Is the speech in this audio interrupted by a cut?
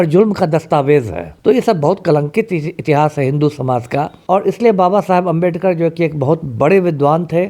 yes; 2 cuts; at 1.2 s, 4.1 s

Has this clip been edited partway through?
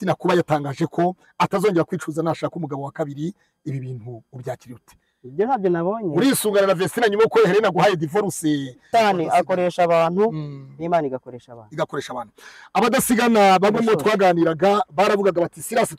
yes; 1 cut; at 8.9 s

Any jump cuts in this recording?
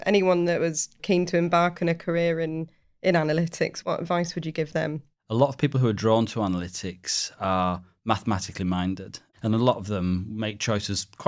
yes; 3 cuts; at 1.0 s, 3.8 s, 5.1 s

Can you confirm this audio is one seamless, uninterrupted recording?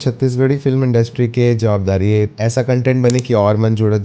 no; 1 cut; at 2.3 s

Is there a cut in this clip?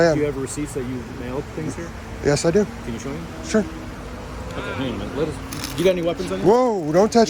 no; 0 cuts

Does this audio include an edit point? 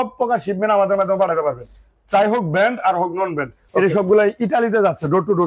yes; 1 cut; at 3.6 s

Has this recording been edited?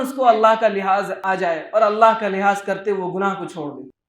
yes; 1 cut; at 1.1 s

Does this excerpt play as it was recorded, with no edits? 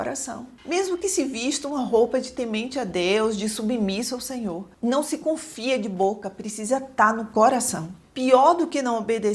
no; 2 cuts; at 4.7 s, 7.8 s

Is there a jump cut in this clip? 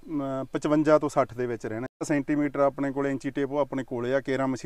yes; 1 cut; at 2.1 s

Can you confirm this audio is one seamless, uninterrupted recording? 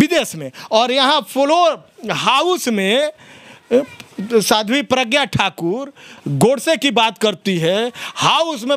yes; 0 cuts

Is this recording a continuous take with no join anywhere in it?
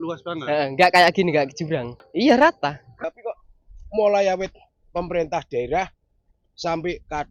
no; 2 cuts; at 2.0 s, 3.1 s

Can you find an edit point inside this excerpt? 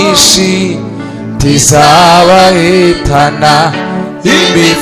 no; 0 cuts

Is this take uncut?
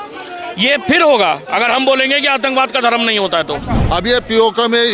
no; 1 cut; at 3.7 s

